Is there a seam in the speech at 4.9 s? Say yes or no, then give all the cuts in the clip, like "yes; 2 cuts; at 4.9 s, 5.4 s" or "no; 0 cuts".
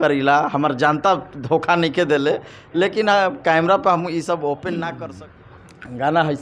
yes; 1 cut; at 4.9 s